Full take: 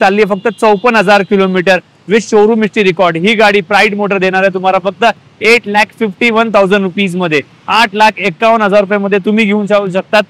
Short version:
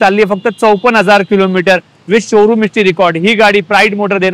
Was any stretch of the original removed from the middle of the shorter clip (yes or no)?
no